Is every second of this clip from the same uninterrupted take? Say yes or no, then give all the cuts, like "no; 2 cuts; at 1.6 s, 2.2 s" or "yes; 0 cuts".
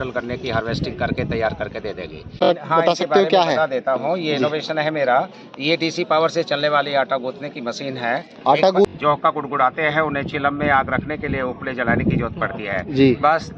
no; 2 cuts; at 2.4 s, 8.9 s